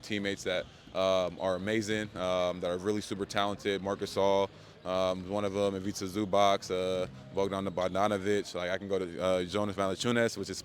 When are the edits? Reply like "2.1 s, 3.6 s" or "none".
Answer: none